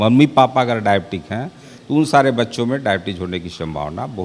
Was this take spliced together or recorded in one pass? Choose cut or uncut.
uncut